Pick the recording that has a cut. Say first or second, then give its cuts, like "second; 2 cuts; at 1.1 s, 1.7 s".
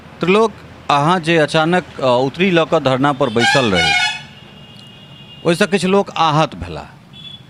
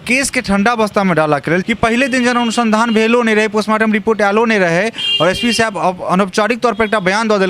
second; 1 cut; at 1.6 s